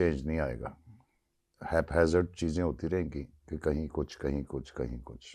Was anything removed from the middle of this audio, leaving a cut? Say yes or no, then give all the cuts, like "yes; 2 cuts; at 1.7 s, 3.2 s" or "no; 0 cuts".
no; 0 cuts